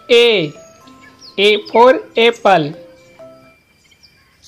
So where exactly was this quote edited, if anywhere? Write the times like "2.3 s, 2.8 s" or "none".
3.5 s